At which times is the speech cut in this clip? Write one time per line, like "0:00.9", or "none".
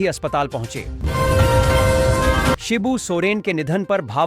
0:00.9
0:02.6